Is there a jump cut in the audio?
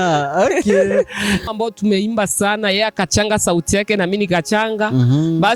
yes; 1 cut; at 1.4 s

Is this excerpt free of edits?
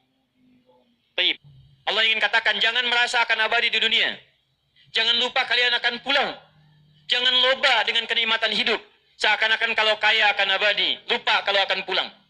no; 1 cut; at 1.4 s

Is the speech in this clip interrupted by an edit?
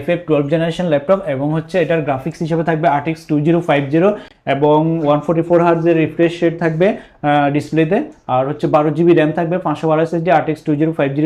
no; 0 cuts

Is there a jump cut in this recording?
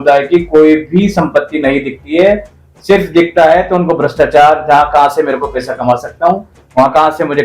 no; 0 cuts

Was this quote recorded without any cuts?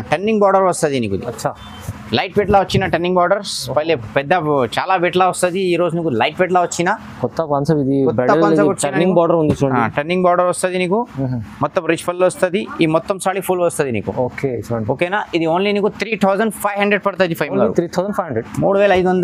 yes; 0 cuts

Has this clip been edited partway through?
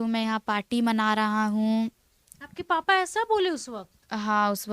no; 0 cuts

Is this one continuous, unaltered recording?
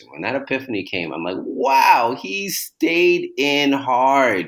yes; 0 cuts

